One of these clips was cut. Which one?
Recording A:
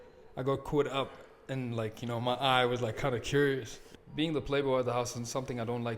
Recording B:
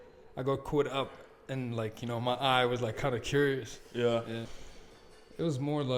A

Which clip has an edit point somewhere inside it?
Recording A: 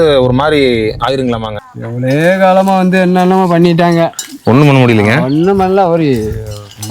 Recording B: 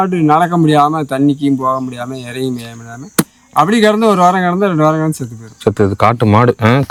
A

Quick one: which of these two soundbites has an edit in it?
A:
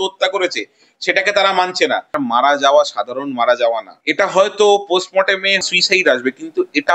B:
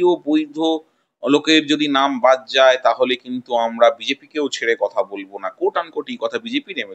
A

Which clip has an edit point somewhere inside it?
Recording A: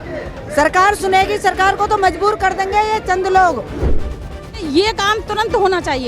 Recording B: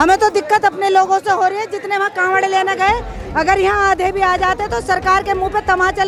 A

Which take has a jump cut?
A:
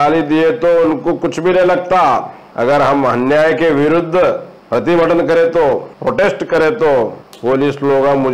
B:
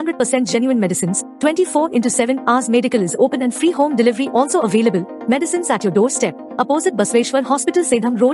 A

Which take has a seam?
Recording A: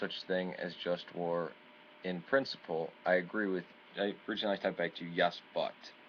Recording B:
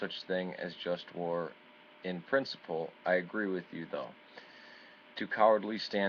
B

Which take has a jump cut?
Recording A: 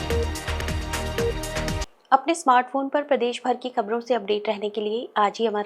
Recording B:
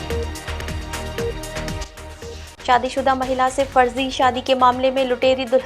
B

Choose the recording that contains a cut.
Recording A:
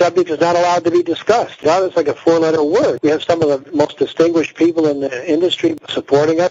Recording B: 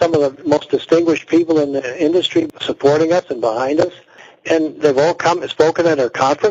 B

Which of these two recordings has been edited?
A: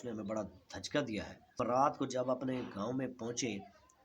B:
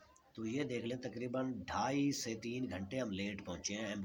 A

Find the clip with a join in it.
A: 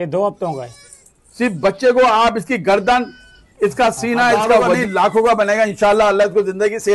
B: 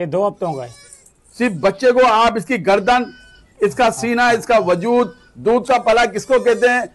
A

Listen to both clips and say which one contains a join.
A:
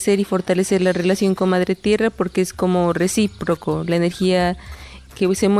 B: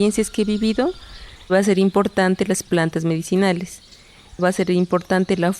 B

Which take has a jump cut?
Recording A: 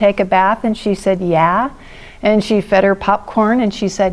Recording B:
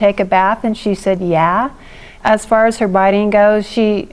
B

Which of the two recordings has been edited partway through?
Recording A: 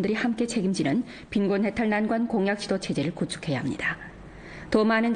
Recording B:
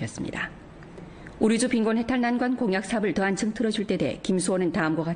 B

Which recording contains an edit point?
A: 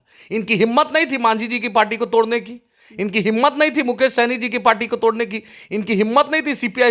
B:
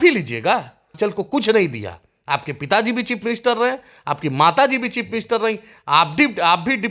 B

